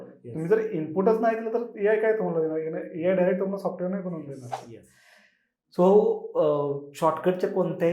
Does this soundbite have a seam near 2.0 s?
no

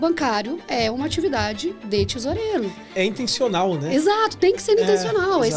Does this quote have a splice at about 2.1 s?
no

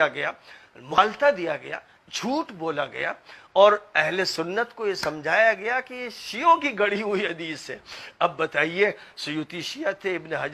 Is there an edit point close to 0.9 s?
yes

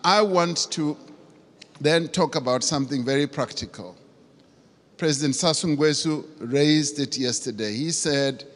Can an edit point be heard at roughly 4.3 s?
yes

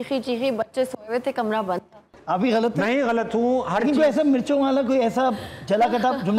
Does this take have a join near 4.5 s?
no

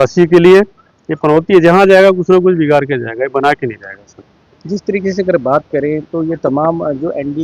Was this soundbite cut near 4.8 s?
no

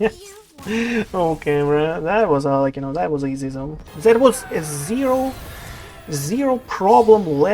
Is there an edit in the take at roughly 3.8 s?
yes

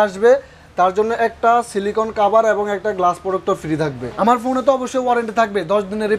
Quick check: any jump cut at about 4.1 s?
yes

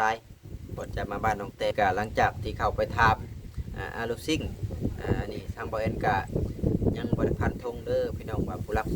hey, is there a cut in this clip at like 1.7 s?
yes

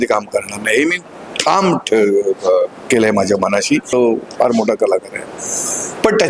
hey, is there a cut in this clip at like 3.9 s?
yes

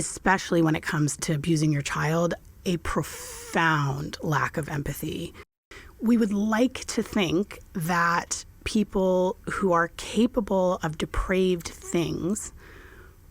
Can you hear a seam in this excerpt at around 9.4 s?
no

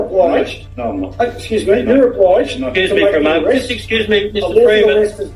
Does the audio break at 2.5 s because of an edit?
no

